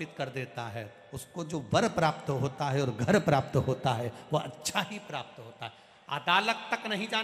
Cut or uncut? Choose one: uncut